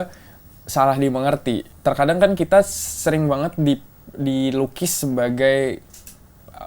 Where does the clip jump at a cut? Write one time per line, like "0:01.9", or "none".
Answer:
0:01.7